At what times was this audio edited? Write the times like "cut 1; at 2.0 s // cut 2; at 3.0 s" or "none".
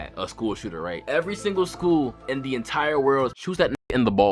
cut 1; at 3.3 s